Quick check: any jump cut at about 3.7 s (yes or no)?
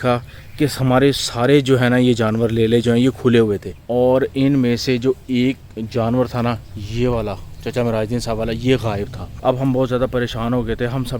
yes